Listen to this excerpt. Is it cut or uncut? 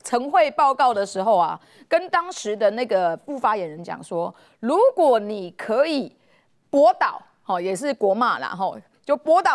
uncut